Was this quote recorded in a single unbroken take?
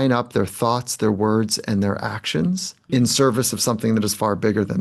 no; 1 cut; at 2.7 s

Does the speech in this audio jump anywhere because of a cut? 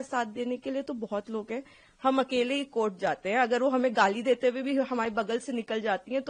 no; 0 cuts

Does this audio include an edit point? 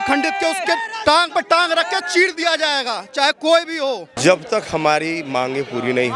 yes; 1 cut; at 4.1 s

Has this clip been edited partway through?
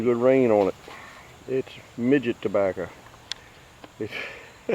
no; 0 cuts

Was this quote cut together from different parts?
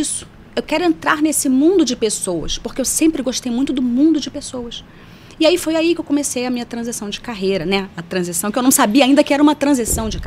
no; 0 cuts

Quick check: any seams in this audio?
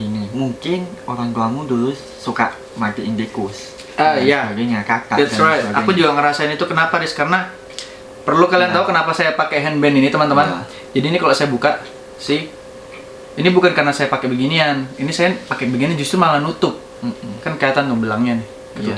no; 0 cuts

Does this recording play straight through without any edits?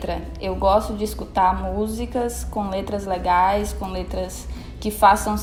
yes; 0 cuts

